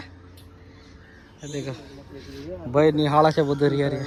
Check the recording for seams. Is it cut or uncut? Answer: uncut